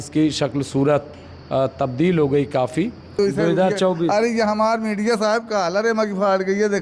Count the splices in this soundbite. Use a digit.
1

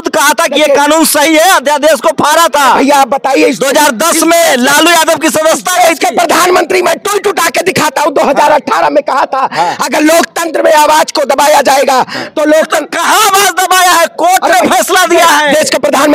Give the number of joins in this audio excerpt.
0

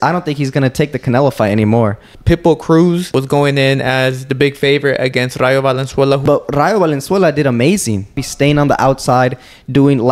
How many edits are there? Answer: 4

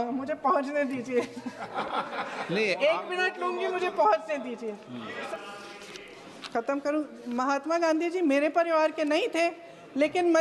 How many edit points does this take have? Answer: 1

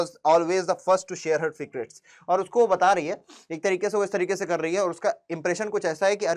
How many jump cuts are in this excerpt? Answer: 0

